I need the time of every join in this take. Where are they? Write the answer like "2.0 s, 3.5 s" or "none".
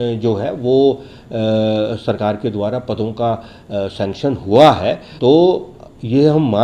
none